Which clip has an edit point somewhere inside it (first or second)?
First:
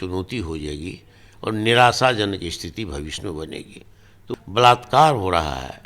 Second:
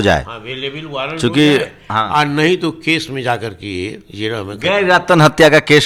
first